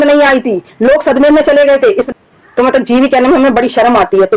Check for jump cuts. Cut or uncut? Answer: cut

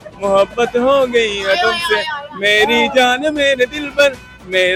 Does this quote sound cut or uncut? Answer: uncut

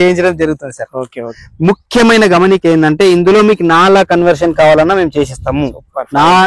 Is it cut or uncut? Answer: cut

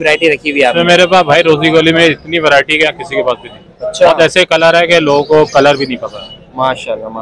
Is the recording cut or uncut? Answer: uncut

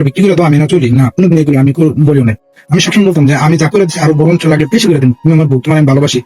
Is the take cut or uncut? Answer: uncut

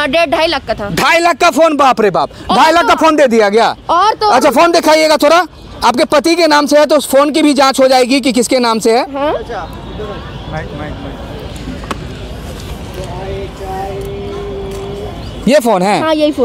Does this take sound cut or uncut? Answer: uncut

